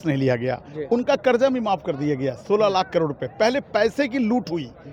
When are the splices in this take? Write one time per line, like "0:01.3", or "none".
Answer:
none